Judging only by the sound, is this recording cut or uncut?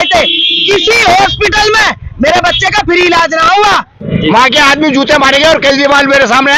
cut